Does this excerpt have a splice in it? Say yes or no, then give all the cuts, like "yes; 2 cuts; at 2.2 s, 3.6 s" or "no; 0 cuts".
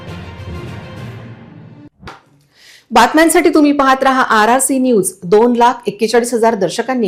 no; 0 cuts